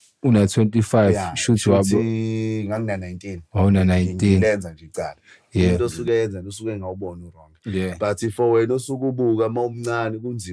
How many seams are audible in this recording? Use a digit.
1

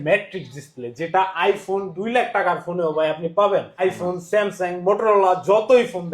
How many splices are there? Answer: 1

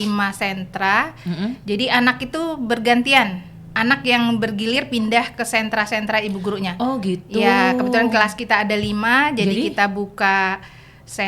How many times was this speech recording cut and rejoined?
0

